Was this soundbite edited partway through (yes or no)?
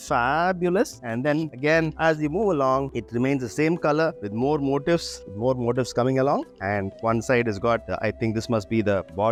no